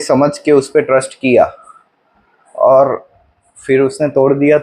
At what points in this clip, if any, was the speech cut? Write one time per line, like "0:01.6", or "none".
none